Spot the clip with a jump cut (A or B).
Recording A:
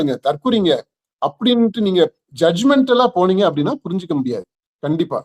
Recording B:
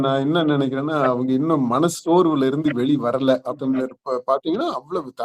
B